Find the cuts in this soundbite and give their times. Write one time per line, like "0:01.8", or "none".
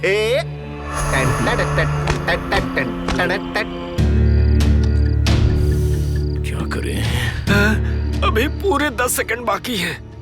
0:04.0